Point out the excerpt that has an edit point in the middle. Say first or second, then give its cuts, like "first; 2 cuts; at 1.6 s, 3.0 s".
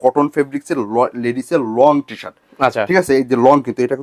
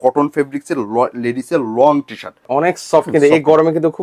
second; 1 cut; at 2.4 s